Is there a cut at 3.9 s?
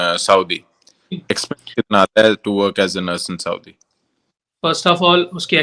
no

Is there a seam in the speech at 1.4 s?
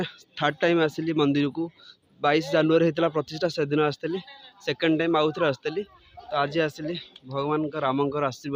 no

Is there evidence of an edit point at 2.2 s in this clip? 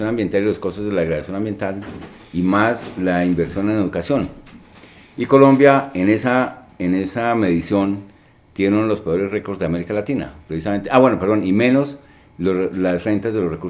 no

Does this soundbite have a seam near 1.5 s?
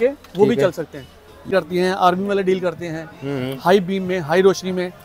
yes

